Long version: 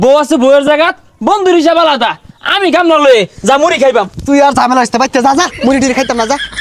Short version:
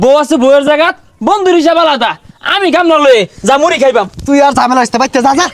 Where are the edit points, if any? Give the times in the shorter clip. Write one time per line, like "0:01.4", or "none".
none